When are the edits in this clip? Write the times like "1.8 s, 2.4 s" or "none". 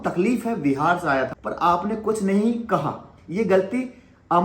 1.4 s